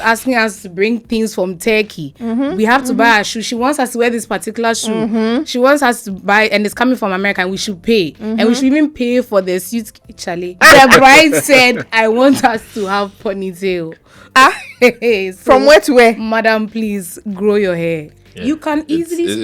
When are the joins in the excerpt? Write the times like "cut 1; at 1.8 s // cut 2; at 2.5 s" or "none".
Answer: cut 1; at 10.6 s // cut 2; at 18.1 s